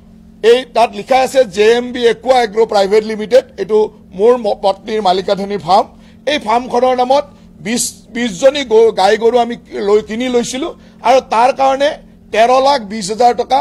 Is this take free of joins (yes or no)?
yes